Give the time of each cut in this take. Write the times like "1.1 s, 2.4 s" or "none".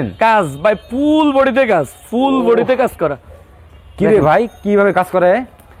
none